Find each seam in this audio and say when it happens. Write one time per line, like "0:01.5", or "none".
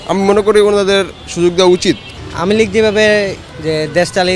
0:02.1
0:03.5